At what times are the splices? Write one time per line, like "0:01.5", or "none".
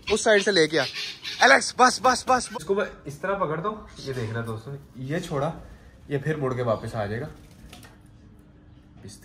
0:02.5